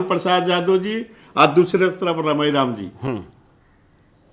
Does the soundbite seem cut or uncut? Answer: uncut